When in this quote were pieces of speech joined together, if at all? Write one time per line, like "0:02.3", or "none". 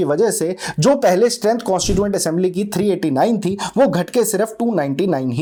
none